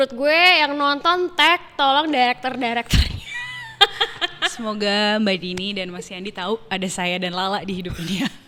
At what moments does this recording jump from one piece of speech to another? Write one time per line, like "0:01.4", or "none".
none